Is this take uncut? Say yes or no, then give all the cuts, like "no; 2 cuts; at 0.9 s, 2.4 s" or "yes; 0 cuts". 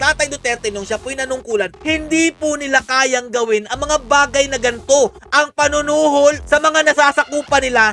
no; 1 cut; at 6.4 s